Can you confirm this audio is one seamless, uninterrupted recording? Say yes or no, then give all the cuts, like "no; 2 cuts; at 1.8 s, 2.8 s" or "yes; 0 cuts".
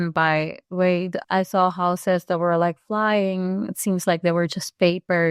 no; 1 cut; at 1.2 s